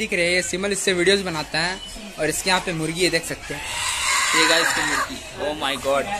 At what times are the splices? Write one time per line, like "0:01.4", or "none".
none